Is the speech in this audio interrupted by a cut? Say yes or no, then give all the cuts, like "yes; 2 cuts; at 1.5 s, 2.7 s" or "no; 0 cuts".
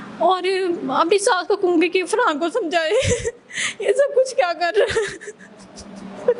no; 0 cuts